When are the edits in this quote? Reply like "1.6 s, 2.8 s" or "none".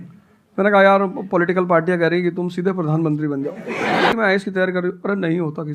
4.1 s